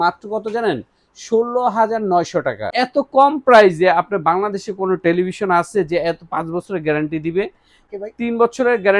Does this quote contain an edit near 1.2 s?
no; 2 cuts; at 2.6 s, 7.8 s

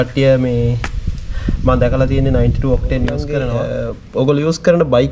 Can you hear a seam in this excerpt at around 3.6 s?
yes; 1 cut; at 3.6 s

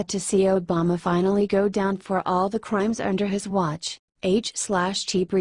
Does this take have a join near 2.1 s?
no; 0 cuts

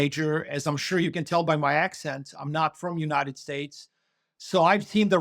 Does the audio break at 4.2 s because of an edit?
no; 0 cuts

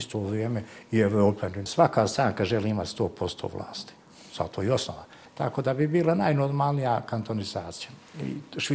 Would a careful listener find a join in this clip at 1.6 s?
yes; 2 cuts; at 1.6 s, 5.2 s

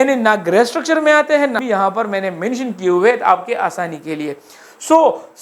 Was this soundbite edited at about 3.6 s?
no; 1 cut; at 1.5 s

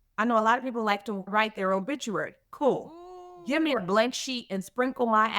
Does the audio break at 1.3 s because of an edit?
yes; 1 cut; at 1.3 s

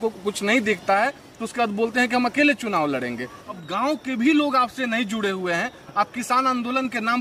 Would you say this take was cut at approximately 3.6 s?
yes; 1 cut; at 3.6 s

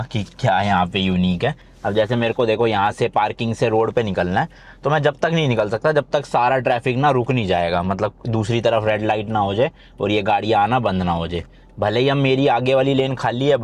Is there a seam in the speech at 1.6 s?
no; 0 cuts

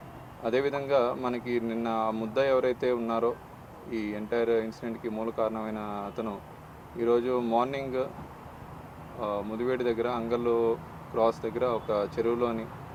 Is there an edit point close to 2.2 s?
no; 0 cuts

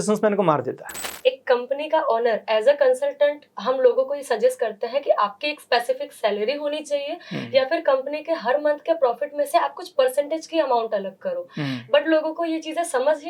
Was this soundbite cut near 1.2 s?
yes; 1 cut; at 1.2 s

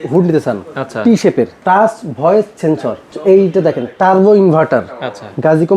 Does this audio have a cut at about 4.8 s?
no; 2 cuts; at 1.6 s, 3.1 s

